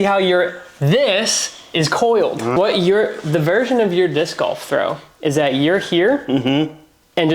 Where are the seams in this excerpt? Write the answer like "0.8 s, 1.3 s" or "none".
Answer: 2.5 s